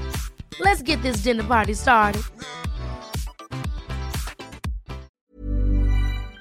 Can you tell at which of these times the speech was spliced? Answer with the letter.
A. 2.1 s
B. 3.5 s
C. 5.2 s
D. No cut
C